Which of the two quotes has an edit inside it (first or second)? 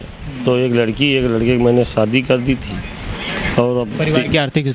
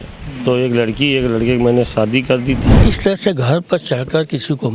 second